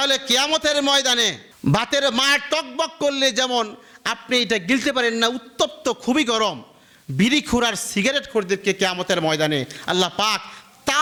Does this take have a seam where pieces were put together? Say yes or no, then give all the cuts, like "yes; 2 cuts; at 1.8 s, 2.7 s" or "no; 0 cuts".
no; 0 cuts